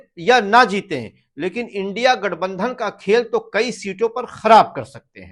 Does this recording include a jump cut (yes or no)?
no